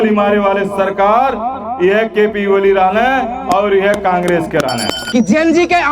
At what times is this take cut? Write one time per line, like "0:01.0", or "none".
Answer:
0:05.0

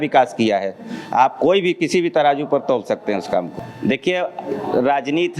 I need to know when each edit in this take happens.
0:03.6

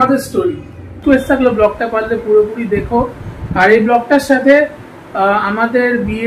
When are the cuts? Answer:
0:01.0

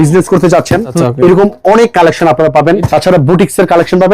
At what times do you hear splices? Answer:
0:01.0
0:02.9

